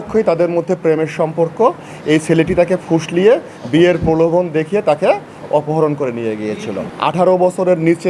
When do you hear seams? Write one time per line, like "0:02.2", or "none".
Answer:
none

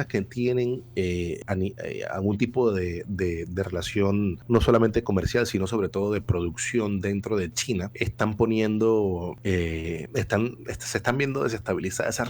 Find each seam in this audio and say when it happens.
0:01.4
0:04.4
0:07.9
0:09.8

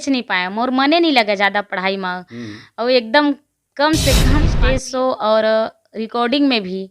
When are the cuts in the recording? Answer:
0:04.5

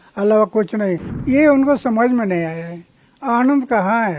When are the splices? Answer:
0:01.1

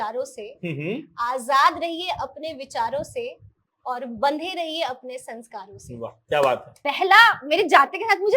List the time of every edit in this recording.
0:06.7

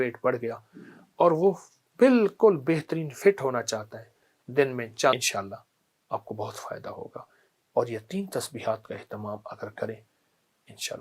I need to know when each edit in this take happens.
0:05.2

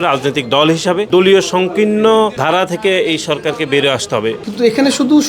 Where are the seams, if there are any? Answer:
0:01.1
0:02.4
0:04.4

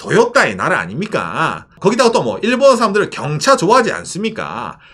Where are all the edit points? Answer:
0:01.7

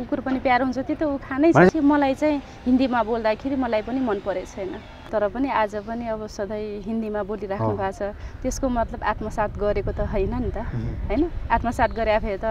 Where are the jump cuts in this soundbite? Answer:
0:01.7
0:04.9

